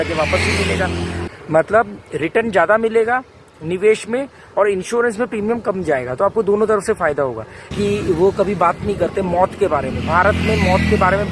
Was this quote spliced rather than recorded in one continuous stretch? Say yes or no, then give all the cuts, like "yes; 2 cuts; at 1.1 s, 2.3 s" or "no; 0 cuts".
yes; 2 cuts; at 1.2 s, 7.7 s